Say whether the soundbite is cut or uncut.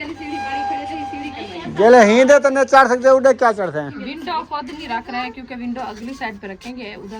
cut